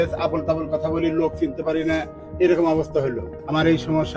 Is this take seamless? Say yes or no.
no